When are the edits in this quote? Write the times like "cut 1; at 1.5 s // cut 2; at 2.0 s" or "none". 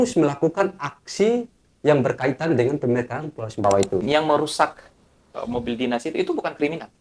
cut 1; at 4.0 s